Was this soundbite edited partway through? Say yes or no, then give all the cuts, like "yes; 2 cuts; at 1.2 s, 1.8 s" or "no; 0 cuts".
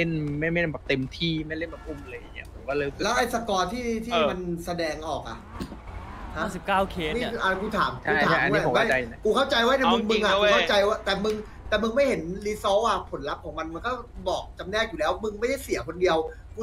no; 0 cuts